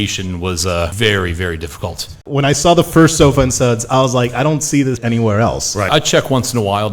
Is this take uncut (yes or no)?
no